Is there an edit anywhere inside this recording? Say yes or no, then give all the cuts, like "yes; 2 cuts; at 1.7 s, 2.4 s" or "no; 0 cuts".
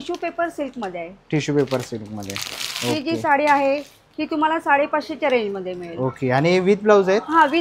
no; 0 cuts